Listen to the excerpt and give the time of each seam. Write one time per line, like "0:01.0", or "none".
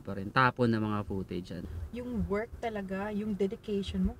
0:01.6